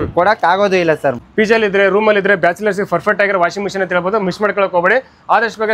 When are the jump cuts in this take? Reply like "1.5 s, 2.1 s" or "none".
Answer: 1.3 s